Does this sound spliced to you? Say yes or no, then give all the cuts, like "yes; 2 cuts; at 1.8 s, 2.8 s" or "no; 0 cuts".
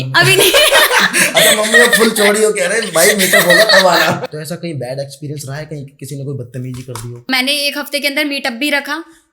yes; 2 cuts; at 4.3 s, 7.3 s